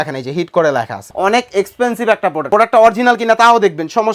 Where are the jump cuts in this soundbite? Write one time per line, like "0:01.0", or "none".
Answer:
0:01.0
0:02.5